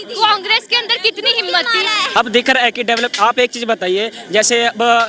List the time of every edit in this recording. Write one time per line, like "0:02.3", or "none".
0:02.1